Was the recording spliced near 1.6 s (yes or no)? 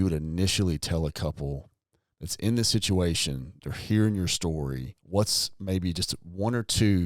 no